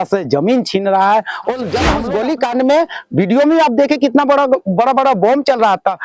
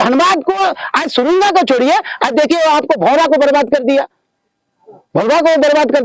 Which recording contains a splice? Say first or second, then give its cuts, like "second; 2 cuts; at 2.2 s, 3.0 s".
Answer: first; 1 cut; at 1.9 s